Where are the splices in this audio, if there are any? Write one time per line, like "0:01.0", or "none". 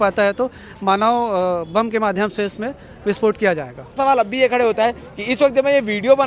0:04.0